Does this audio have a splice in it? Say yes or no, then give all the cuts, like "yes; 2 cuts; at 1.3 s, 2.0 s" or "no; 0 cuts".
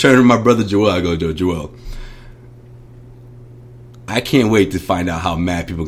no; 0 cuts